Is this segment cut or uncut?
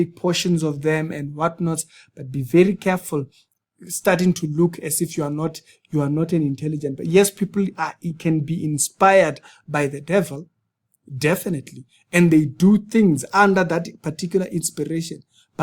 uncut